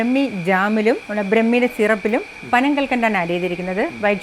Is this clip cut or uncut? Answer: uncut